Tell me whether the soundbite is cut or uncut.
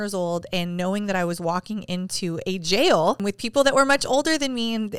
cut